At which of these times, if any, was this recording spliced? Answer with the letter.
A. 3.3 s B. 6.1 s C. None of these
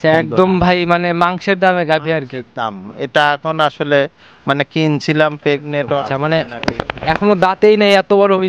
B